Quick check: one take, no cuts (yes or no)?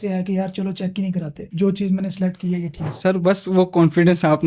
yes